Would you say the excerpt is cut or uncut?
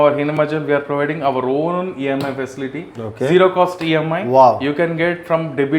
uncut